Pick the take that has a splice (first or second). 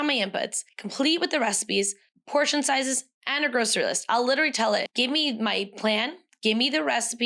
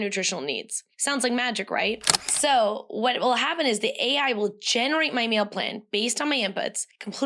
second